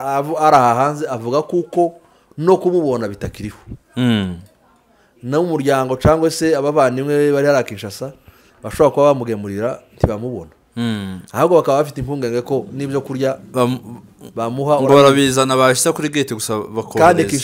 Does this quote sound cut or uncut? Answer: uncut